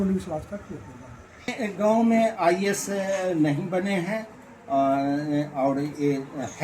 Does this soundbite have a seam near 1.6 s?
yes; 1 cut; at 1.6 s

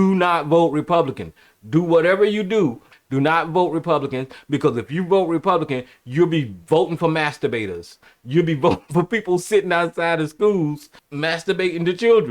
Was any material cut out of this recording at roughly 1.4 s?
no; 1 cut; at 2.9 s

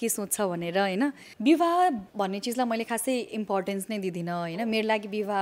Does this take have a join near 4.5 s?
no; 1 cut; at 1.3 s

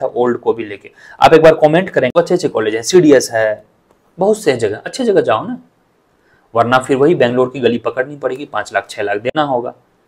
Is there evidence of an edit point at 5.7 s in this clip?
no; 1 cut; at 2.1 s

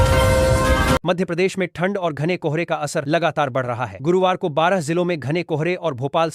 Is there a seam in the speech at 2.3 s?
no; 1 cut; at 1.0 s

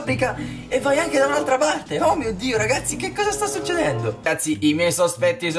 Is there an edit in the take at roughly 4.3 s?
yes; 1 cut; at 4.3 s

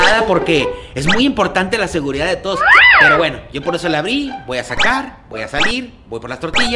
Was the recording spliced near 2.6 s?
no; 0 cuts

